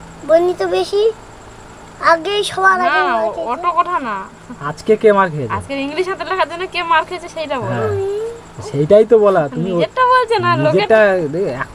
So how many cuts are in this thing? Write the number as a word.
zero